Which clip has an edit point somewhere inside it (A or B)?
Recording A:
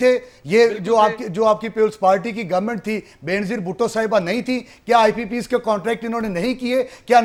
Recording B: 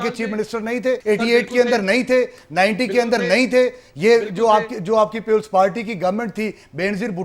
B